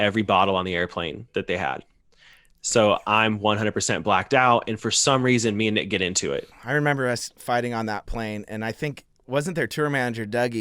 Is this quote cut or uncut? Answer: cut